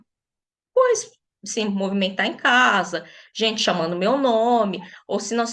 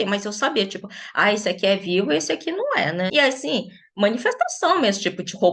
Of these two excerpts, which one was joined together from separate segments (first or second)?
second